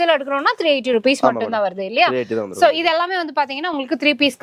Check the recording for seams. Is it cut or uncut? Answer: uncut